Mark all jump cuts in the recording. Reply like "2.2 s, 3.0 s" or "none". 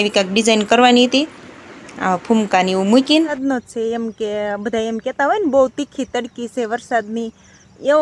3.4 s